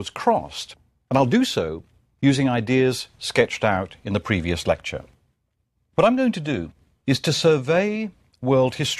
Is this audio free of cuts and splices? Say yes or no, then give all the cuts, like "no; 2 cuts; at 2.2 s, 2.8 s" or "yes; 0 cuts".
yes; 0 cuts